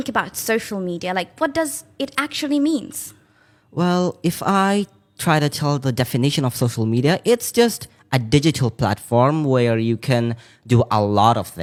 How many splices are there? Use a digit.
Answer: 0